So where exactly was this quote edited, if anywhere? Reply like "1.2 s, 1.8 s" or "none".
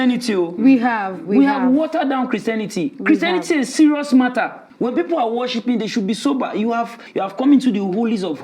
4.6 s, 7.0 s